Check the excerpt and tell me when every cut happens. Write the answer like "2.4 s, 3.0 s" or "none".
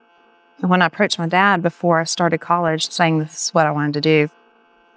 2.9 s